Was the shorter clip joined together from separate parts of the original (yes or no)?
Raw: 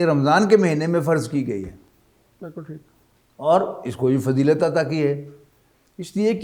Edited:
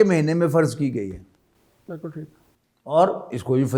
no